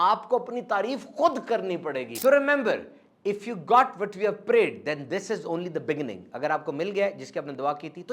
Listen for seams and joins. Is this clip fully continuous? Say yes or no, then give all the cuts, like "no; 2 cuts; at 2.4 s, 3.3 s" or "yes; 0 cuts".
no; 1 cut; at 2.1 s